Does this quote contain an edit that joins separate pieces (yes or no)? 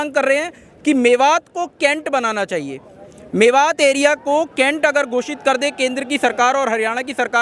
no